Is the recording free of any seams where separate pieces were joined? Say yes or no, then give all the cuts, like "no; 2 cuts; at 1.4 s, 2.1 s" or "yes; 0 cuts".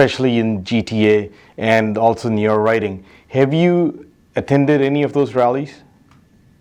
yes; 0 cuts